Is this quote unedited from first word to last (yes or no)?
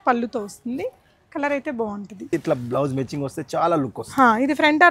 no